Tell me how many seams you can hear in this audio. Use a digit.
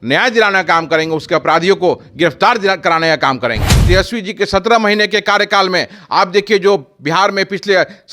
1